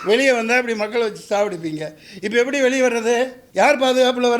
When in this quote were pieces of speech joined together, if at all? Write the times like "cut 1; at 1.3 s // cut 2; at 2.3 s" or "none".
cut 1; at 3.4 s